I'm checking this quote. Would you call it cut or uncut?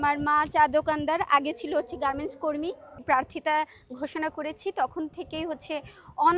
cut